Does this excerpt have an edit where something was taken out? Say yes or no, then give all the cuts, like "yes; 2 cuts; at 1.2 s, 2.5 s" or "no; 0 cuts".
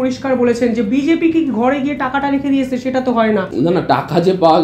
yes; 1 cut; at 3.5 s